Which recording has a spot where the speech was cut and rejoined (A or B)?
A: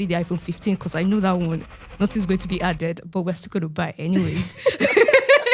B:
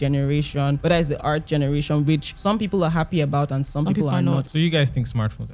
B